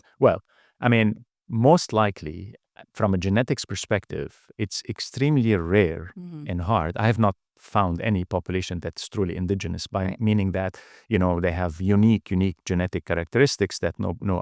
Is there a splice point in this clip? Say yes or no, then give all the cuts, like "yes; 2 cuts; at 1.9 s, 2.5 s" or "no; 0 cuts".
no; 0 cuts